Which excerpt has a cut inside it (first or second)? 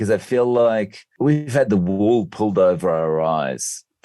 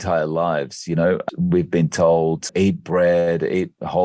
second